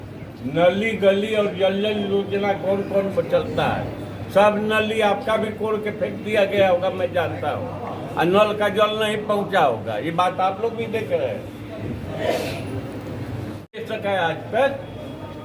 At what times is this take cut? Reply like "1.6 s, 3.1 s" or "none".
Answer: 13.6 s